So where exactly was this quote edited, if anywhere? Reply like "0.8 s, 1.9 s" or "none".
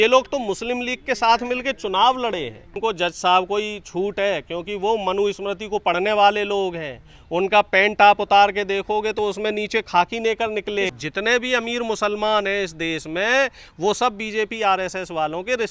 2.8 s, 10.9 s